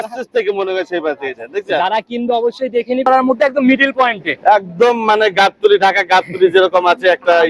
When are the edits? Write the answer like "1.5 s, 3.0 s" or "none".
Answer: 3.0 s